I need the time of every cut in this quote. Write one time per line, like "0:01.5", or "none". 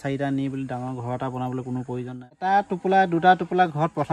0:02.3